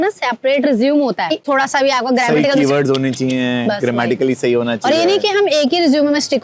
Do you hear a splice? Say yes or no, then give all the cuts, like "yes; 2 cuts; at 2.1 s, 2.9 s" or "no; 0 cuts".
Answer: yes; 1 cut; at 1.4 s